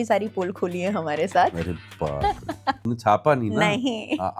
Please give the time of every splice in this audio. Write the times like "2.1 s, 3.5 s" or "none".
2.9 s